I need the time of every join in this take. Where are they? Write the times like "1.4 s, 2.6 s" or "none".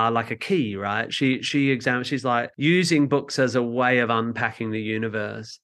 2.5 s